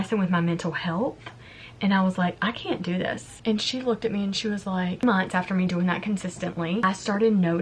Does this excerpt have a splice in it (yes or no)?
yes